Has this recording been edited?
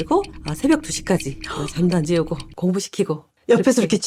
no; 0 cuts

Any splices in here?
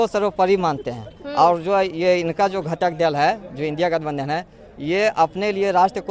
no; 0 cuts

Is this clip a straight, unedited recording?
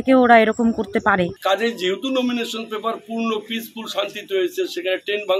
no; 1 cut; at 1.4 s

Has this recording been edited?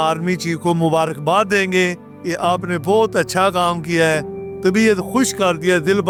no; 0 cuts

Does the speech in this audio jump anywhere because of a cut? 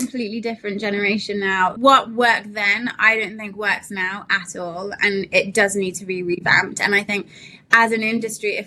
yes; 1 cut; at 1.8 s

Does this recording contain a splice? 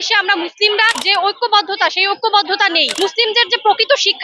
yes; 2 cuts; at 1.0 s, 2.9 s

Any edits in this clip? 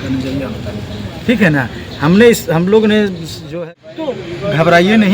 yes; 1 cut; at 3.5 s

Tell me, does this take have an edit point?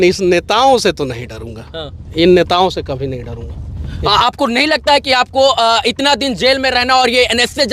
no; 0 cuts

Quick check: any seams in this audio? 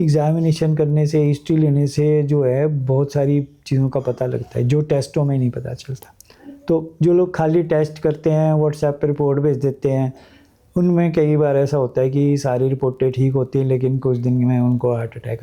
no; 0 cuts

